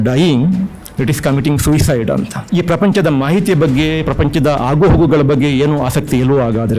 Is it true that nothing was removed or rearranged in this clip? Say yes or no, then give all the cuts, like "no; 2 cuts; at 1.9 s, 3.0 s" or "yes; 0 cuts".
no; 1 cut; at 2.4 s